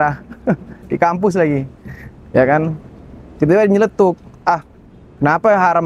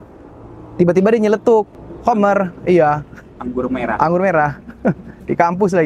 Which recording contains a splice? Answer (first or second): second